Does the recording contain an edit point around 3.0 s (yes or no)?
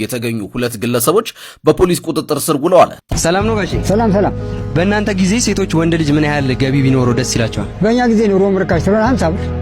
yes